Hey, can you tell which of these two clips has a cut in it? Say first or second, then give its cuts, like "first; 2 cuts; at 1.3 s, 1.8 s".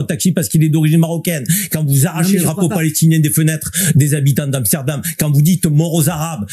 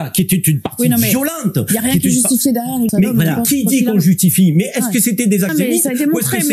second; 2 cuts; at 2.9 s, 5.5 s